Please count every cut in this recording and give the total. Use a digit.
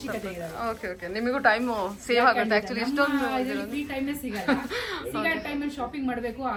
0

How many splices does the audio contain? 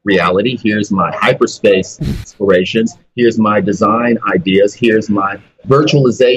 2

